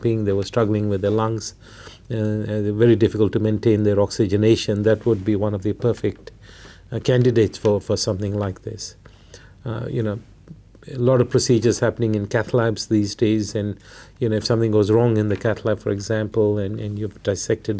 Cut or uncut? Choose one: uncut